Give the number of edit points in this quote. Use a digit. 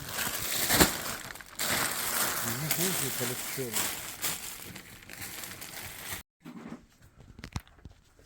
1